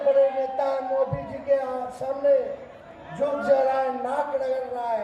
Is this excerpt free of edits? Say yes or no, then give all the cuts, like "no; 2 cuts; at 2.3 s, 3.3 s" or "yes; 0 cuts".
yes; 0 cuts